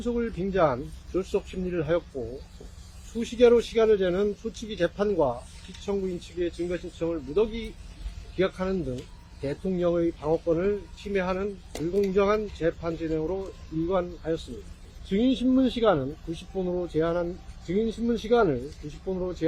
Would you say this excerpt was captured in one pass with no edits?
yes; 0 cuts

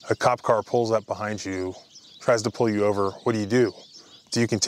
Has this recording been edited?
no; 0 cuts

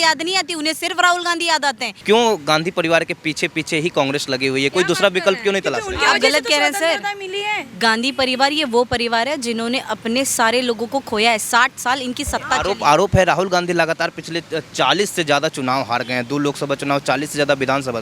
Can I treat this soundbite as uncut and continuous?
no; 1 cut; at 1.9 s

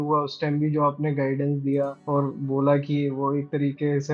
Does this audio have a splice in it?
yes; 1 cut; at 2.0 s

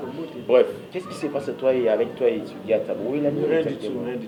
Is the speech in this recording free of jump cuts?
yes; 0 cuts

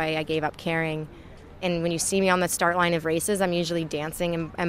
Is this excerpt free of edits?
no; 1 cut; at 1.6 s

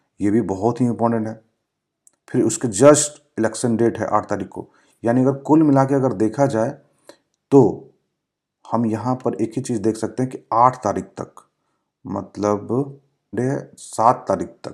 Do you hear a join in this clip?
yes; 1 cut; at 13.3 s

